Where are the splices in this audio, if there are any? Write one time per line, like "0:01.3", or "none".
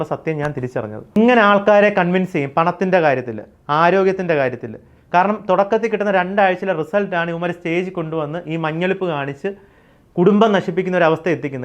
0:01.2